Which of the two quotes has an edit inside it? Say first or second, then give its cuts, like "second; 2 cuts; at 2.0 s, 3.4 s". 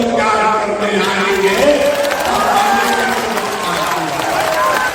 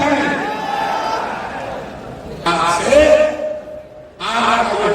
second; 1 cut; at 2.4 s